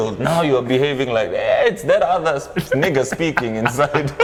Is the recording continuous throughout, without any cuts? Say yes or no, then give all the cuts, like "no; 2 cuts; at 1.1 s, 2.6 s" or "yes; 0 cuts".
yes; 0 cuts